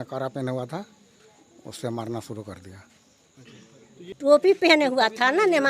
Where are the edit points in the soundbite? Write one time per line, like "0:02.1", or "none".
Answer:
0:04.1